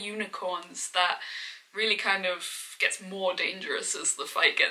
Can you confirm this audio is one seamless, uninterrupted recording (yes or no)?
yes